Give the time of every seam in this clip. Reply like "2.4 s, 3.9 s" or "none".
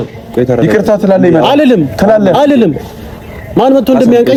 none

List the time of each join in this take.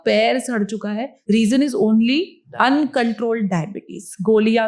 1.1 s, 2.4 s

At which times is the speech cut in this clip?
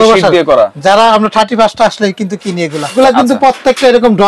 2.9 s

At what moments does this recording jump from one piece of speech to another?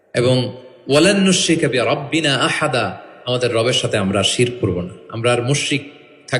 none

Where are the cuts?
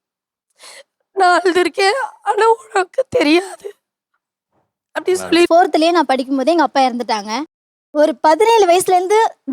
5.5 s

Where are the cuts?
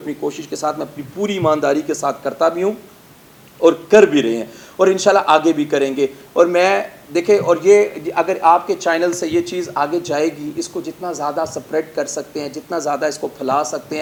none

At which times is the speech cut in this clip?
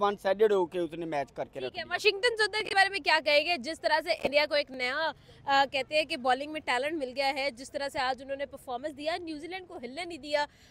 none

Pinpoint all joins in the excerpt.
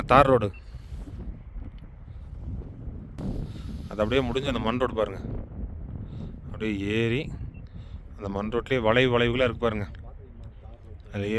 3.2 s

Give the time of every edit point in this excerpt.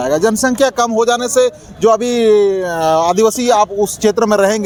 none

